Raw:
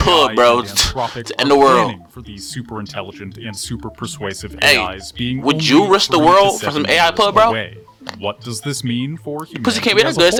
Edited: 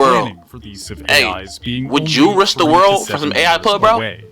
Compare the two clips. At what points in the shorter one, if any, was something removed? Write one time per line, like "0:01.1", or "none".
0:00.9